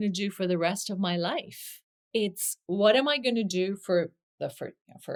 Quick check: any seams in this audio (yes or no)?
no